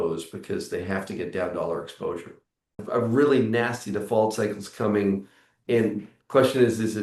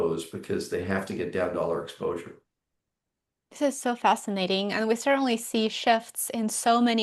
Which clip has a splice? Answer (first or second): first